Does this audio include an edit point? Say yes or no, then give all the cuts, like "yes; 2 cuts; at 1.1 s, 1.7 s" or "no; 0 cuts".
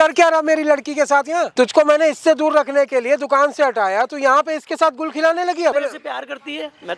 yes; 2 cuts; at 1.5 s, 5.7 s